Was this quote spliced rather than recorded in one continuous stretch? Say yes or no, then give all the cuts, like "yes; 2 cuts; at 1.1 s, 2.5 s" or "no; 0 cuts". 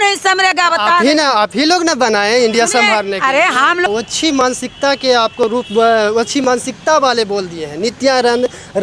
yes; 1 cut; at 3.9 s